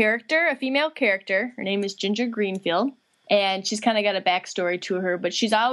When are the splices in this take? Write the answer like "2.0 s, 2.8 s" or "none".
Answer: 3.1 s